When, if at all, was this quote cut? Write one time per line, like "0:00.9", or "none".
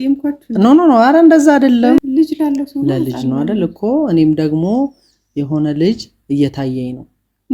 0:02.0